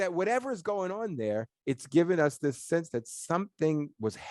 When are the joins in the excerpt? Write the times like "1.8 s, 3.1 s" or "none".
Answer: none